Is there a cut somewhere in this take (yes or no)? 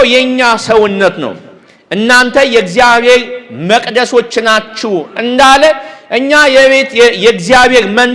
no